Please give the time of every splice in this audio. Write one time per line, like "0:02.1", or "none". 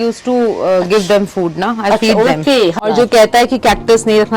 0:02.8